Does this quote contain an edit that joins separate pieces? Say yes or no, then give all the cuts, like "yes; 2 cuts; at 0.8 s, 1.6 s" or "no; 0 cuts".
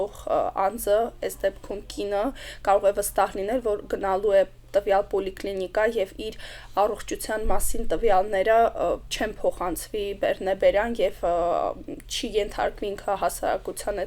no; 0 cuts